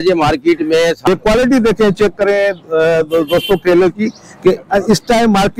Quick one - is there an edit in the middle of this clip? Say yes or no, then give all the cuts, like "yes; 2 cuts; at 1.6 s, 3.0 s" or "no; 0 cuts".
yes; 1 cut; at 1.1 s